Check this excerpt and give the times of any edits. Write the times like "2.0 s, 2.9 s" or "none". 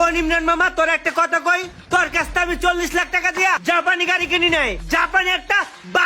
4.8 s